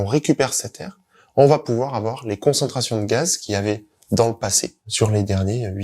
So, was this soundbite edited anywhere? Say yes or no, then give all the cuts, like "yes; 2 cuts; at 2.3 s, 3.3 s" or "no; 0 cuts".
yes; 1 cut; at 4.8 s